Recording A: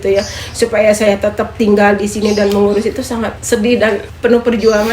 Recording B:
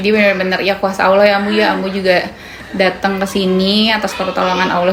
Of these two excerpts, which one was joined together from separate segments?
A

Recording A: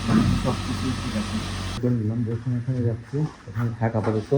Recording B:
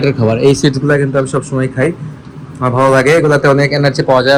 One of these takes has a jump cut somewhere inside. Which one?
A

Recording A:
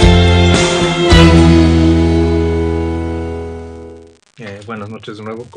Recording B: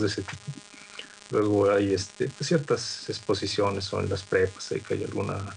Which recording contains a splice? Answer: B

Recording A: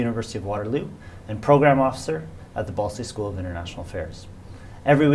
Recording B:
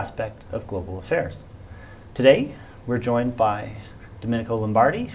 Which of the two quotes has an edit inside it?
B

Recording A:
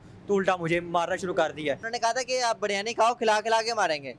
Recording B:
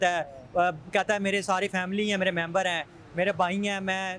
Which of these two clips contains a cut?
A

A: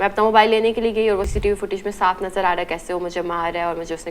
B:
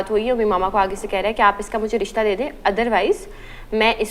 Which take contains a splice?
A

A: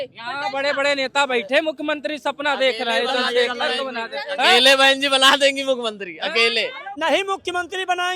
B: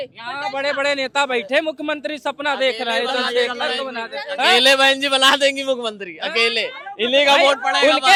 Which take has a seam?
A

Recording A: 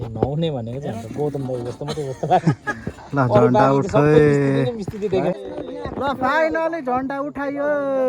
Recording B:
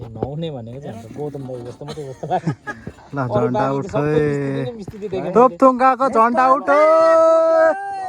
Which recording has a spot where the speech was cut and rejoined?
A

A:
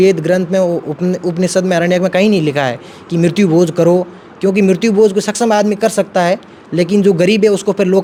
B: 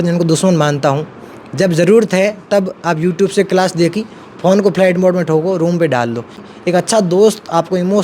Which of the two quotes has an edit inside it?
B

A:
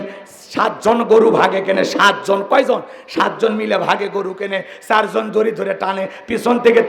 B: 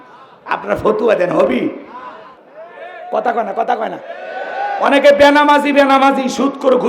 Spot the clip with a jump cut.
B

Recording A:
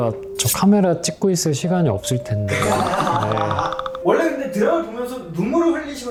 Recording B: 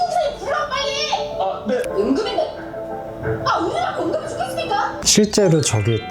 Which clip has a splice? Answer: B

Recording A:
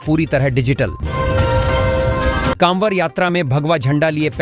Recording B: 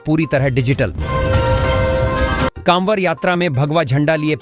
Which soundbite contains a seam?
A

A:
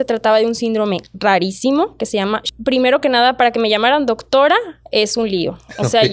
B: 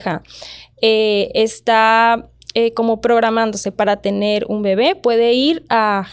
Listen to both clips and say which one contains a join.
A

